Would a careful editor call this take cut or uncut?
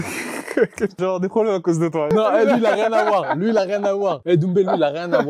cut